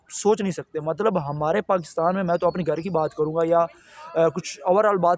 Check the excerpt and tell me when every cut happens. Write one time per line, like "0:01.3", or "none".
none